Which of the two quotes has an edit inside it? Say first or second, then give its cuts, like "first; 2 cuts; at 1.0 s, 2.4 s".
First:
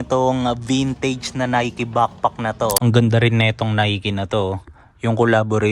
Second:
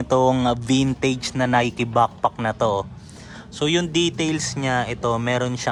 first; 1 cut; at 2.8 s